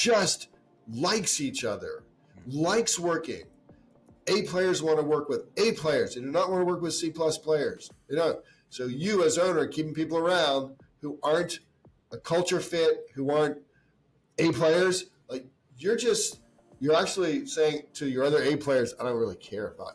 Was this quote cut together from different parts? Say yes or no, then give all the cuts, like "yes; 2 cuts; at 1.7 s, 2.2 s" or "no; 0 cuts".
no; 0 cuts